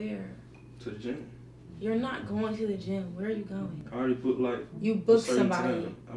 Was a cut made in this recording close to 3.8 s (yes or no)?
yes